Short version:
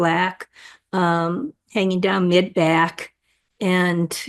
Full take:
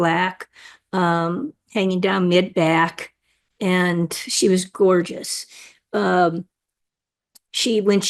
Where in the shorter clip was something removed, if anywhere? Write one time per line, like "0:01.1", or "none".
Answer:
none